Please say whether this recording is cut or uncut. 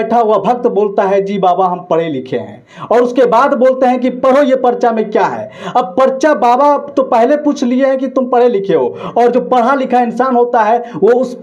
uncut